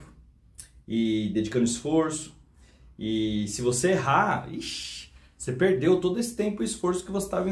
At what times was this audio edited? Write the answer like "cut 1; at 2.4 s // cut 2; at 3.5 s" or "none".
none